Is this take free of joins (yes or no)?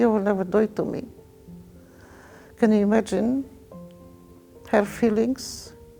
yes